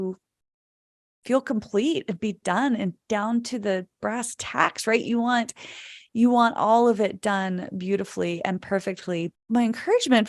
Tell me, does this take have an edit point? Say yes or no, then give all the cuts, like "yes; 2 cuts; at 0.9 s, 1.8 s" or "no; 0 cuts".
yes; 1 cut; at 9.3 s